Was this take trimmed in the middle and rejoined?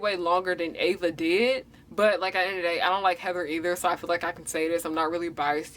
no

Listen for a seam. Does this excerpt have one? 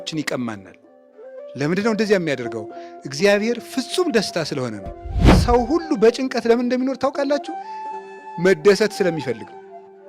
yes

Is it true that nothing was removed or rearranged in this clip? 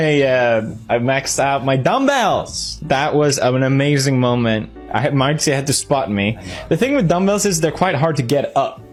yes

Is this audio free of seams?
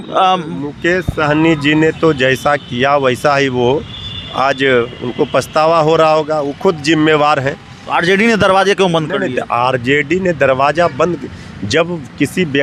yes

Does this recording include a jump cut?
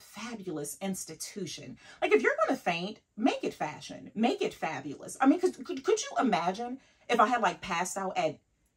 no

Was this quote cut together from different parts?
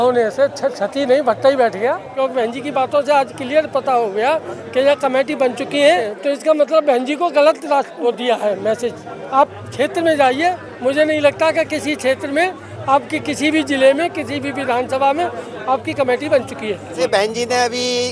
yes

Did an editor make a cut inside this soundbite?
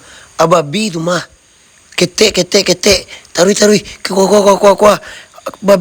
no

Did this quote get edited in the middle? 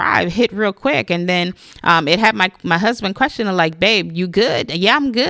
no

